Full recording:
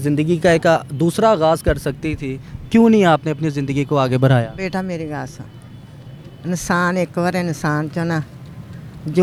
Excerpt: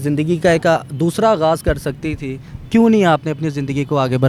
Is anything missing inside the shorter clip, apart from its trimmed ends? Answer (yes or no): no